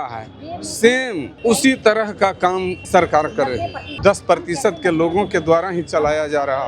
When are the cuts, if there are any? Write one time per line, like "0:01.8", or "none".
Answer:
0:01.3
0:02.8
0:04.0